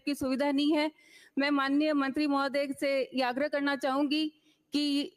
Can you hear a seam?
no; 0 cuts

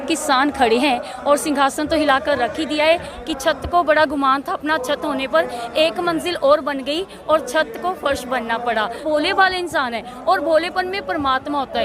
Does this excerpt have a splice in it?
yes; 3 cuts; at 1.1 s, 3.1 s, 9.0 s

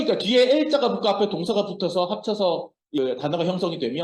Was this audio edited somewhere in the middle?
yes; 1 cut; at 3.0 s

